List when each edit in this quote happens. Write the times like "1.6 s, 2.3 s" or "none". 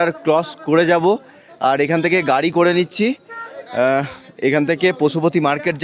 none